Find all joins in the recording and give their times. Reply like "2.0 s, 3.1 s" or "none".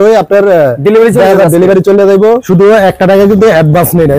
2.4 s